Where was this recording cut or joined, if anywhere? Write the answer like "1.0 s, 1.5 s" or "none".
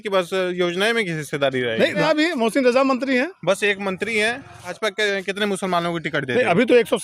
2.0 s, 4.7 s